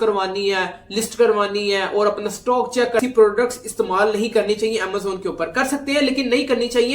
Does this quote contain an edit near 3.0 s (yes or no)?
yes